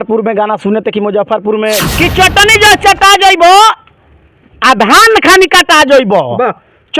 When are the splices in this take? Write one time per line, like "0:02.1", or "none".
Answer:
0:01.8